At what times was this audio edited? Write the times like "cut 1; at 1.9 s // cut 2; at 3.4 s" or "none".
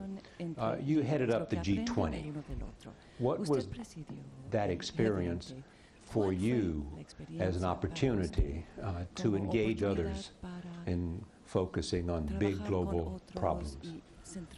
cut 1; at 13.2 s